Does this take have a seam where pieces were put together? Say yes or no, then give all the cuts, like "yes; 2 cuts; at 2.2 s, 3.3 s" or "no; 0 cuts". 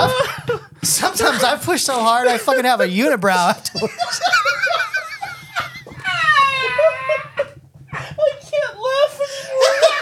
no; 0 cuts